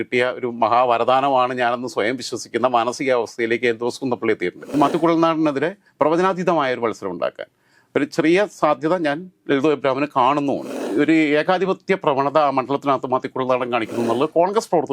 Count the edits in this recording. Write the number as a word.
two